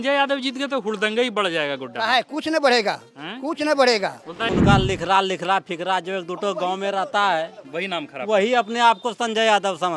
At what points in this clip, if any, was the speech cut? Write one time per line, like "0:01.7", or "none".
0:04.6